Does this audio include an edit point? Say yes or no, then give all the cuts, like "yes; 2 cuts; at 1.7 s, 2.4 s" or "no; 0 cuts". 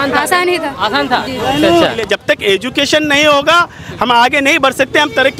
yes; 1 cut; at 2.0 s